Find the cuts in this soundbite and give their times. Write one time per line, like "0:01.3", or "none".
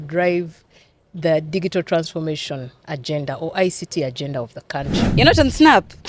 0:05.0

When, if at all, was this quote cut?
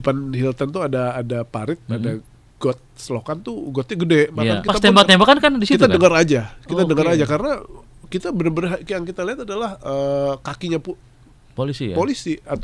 0:04.6

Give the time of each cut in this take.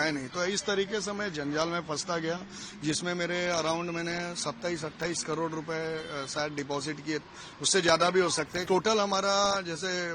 0:08.6

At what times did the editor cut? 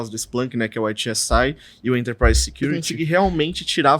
0:02.8

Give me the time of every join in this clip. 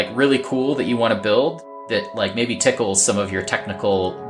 0:01.7

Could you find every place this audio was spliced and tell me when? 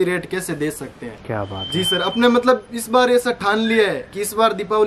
0:01.2

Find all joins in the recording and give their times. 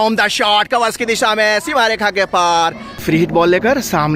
0:03.0

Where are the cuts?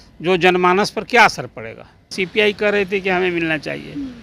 0:02.2

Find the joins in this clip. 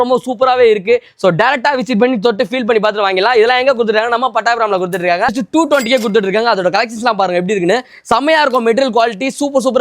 0:05.4

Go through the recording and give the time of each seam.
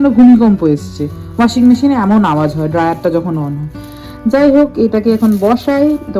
none

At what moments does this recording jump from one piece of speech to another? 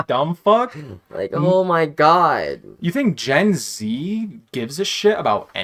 none

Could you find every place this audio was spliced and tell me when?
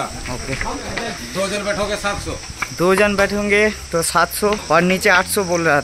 0:01.2
0:04.6

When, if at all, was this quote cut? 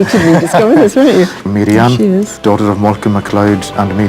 0:01.4
0:02.3

